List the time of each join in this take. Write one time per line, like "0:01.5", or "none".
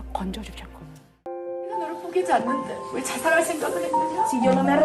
0:01.3